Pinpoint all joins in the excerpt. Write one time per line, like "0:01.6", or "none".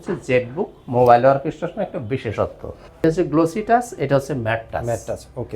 0:03.0